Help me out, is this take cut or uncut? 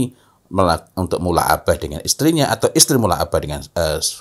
uncut